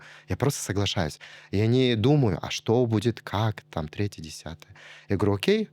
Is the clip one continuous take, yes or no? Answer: yes